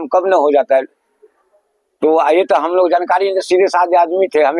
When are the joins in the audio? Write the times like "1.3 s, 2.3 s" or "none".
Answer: none